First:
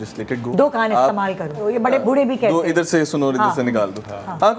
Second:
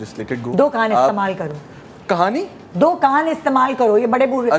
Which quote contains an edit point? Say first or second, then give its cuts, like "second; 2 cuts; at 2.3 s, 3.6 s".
first; 1 cut; at 2.0 s